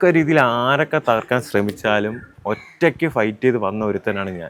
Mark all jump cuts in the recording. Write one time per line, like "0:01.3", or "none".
none